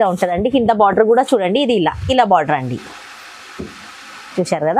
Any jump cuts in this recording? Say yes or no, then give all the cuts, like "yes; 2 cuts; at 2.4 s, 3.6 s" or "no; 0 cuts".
no; 0 cuts